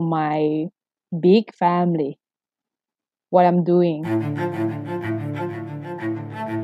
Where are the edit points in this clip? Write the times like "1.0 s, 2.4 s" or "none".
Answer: 4.0 s